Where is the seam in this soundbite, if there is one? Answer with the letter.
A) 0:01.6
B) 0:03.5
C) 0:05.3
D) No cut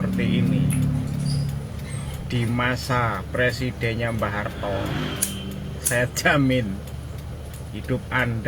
D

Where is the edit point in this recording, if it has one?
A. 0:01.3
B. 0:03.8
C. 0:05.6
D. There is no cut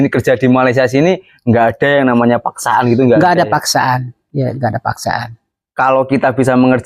D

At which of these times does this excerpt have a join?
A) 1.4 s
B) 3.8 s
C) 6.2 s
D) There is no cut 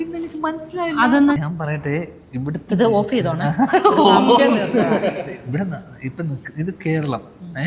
A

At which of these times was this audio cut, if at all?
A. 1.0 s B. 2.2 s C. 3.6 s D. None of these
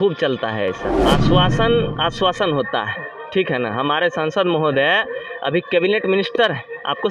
A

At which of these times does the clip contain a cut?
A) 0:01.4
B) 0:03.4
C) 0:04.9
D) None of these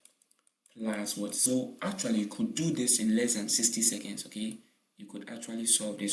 A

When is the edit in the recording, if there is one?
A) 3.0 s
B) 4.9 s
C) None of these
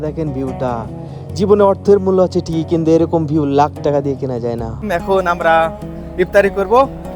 B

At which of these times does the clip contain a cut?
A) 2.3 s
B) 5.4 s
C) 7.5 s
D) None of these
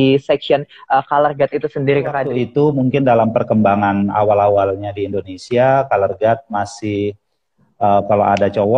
A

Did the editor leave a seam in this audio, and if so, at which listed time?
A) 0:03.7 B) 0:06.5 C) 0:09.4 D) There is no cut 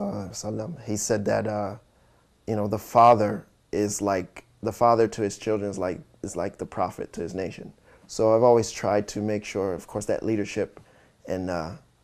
D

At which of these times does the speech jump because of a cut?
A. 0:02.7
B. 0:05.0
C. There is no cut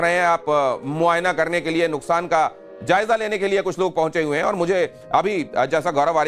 A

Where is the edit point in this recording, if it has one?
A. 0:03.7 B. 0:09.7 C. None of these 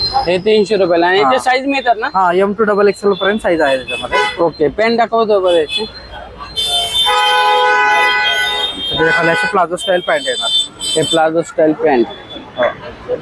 C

